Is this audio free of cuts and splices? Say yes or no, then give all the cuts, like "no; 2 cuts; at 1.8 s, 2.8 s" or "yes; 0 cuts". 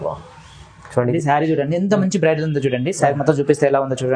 no; 1 cut; at 1.1 s